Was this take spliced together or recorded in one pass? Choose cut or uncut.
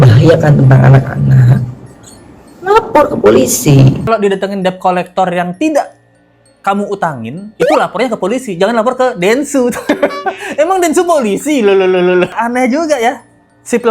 cut